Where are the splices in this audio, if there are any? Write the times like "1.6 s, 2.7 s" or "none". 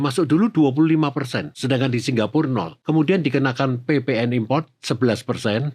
1.5 s, 2.7 s